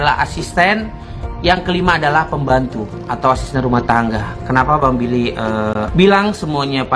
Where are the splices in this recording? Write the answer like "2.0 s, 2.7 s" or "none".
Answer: none